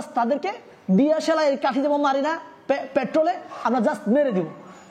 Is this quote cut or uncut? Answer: uncut